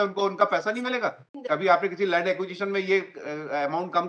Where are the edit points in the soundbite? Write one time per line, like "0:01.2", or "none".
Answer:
0:01.0